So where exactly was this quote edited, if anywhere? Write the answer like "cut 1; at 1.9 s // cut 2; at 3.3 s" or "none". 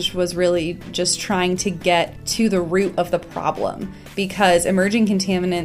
cut 1; at 2.2 s